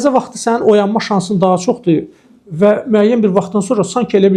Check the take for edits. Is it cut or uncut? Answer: uncut